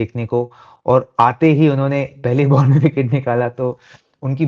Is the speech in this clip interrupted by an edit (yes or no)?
no